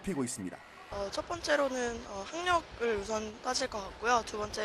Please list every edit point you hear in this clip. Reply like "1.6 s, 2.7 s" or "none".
1.1 s